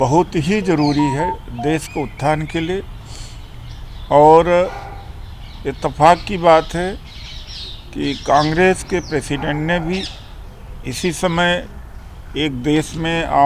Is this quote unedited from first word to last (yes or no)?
yes